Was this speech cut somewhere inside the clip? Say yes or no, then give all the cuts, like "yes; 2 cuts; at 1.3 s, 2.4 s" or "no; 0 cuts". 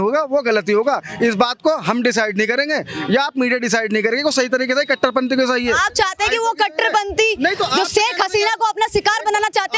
no; 0 cuts